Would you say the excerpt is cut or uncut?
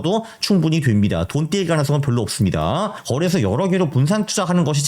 cut